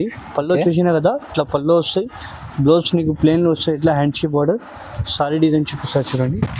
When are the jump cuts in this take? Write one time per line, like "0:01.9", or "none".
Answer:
none